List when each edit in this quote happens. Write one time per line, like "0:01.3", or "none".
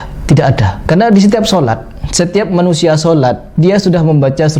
none